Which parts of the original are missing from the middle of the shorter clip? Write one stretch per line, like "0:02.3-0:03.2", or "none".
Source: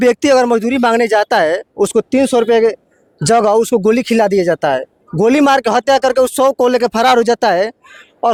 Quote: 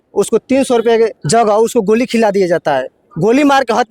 0:02.8-0:03.2

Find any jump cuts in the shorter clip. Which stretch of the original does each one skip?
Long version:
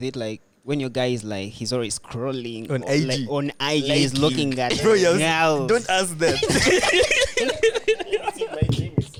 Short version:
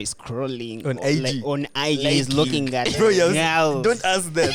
none

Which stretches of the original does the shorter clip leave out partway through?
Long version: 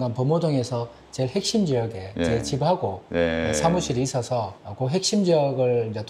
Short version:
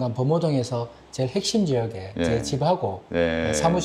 none

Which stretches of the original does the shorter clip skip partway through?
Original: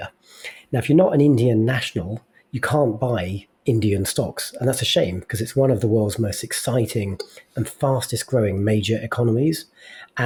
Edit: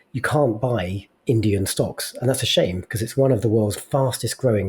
0:06.1-0:07.6

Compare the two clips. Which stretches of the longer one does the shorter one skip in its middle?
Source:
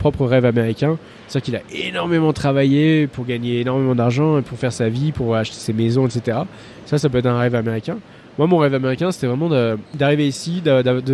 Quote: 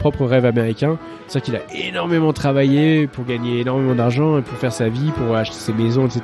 none

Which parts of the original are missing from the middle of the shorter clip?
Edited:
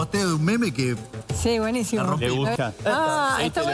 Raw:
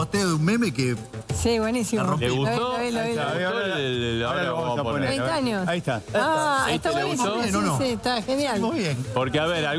0:02.5-0:05.8

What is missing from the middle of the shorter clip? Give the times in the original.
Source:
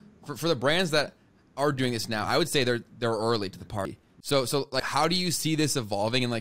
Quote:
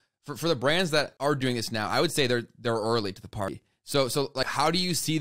0:01.1-0:01.5

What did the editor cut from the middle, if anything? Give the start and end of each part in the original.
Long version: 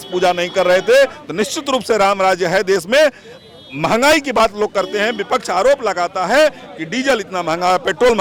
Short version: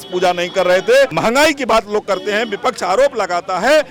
0:01.1-0:03.8

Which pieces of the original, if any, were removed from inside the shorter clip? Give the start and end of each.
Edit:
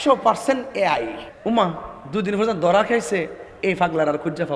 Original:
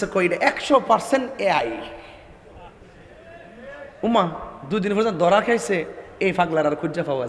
0:01.9-0:03.8

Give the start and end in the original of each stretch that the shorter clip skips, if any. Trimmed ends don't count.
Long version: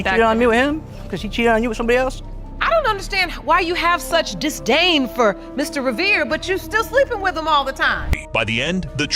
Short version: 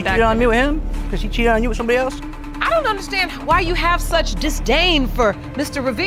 none

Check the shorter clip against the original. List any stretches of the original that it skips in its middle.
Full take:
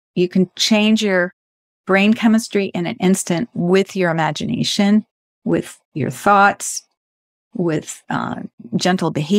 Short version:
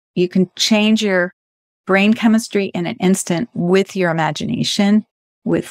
none

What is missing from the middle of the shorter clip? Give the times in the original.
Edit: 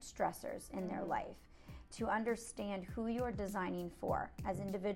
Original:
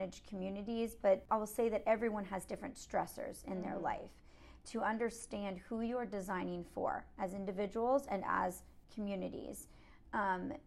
none

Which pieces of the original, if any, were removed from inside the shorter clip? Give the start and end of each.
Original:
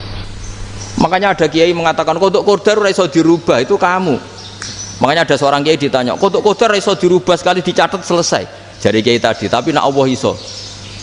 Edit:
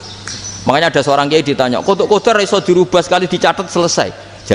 none

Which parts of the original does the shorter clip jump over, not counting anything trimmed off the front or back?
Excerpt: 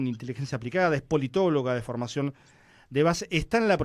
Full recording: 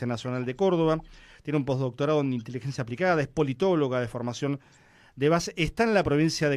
none

